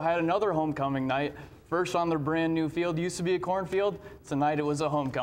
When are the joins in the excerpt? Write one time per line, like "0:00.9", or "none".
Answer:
none